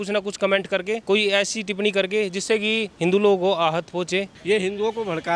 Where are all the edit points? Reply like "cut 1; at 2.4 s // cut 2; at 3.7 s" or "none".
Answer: cut 1; at 1.0 s // cut 2; at 2.9 s // cut 3; at 4.3 s